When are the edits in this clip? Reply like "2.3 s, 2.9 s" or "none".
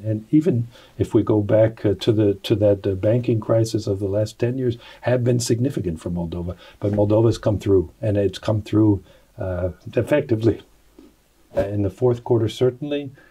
11.6 s